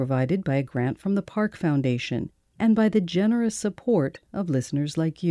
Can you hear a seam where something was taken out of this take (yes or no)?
yes